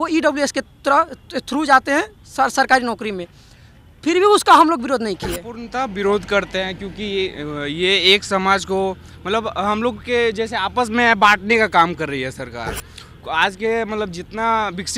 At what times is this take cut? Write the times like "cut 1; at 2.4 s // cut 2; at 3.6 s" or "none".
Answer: cut 1; at 5.6 s